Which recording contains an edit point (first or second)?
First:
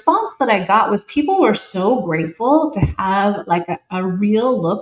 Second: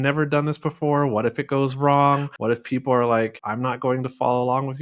second